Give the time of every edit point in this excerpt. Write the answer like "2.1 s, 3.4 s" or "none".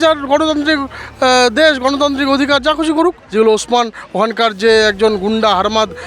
3.2 s